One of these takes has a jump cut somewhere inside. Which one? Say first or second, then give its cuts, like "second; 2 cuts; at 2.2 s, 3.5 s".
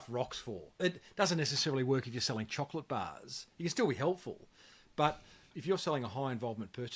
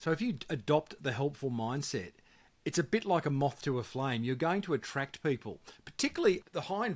first; 1 cut; at 5.5 s